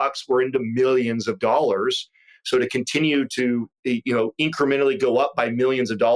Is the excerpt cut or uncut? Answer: uncut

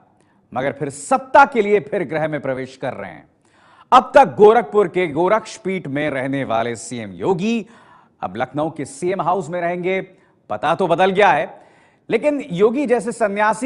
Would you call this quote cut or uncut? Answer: uncut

